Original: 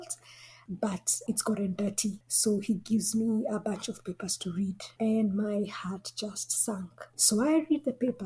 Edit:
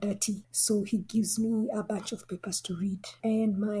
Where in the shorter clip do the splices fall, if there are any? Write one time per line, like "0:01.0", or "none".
none